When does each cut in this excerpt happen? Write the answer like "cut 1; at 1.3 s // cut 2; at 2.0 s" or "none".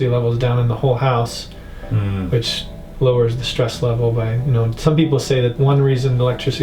cut 1; at 5.5 s